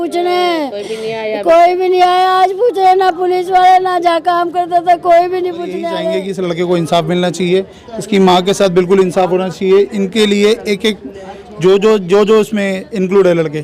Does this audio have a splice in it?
yes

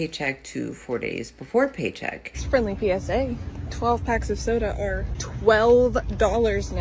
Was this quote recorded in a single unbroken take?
yes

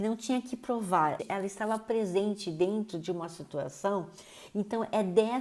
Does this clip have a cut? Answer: yes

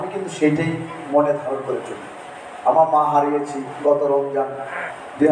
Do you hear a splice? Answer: no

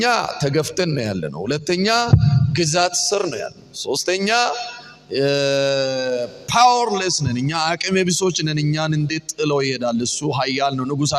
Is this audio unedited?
yes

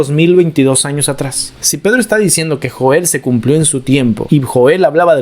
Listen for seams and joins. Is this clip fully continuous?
no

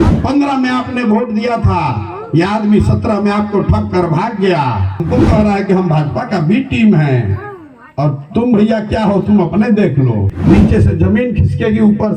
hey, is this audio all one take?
no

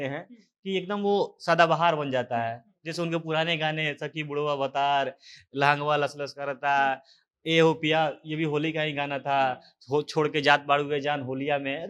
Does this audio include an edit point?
no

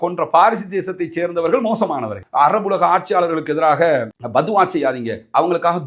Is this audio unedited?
no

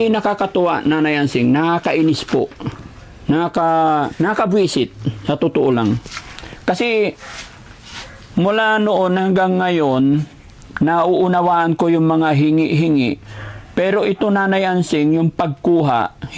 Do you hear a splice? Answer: no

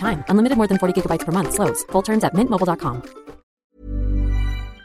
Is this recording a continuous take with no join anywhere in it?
no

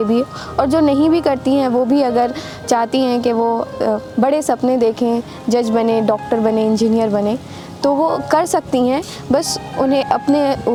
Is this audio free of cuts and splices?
yes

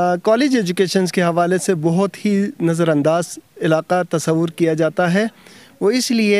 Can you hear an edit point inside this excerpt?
no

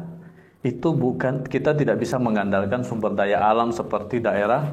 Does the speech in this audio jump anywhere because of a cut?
no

